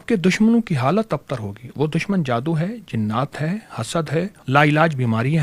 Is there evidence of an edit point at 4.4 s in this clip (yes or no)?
yes